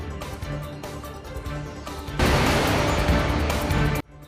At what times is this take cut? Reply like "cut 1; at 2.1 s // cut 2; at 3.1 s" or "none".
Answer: cut 1; at 1.9 s